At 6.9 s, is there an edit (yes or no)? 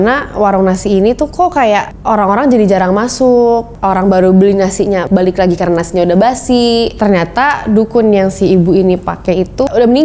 yes